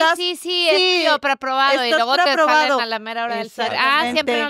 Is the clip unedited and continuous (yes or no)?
yes